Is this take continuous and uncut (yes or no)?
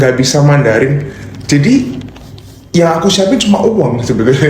yes